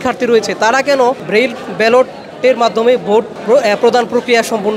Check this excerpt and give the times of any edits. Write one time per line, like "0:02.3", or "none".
0:01.2
0:03.4